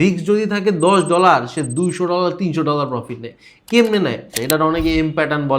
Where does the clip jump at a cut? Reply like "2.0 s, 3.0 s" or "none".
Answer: 4.4 s